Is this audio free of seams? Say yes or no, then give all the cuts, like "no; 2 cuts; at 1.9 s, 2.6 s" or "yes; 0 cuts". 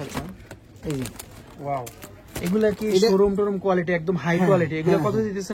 yes; 0 cuts